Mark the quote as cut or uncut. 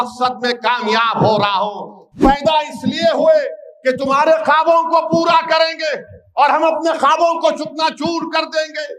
cut